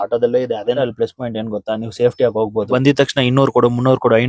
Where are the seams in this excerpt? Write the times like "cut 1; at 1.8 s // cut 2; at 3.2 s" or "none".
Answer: cut 1; at 0.8 s // cut 2; at 2.7 s